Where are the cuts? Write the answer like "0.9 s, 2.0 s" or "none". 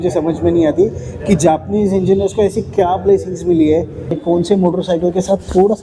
4.2 s